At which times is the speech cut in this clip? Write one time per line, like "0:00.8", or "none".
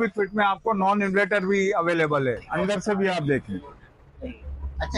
0:02.5